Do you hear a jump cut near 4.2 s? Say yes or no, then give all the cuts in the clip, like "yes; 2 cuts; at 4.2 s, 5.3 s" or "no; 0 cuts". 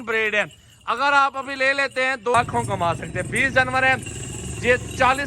no; 1 cut; at 2.3 s